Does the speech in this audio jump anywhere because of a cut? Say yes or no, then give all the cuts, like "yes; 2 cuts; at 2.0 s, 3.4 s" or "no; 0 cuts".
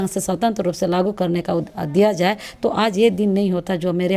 no; 0 cuts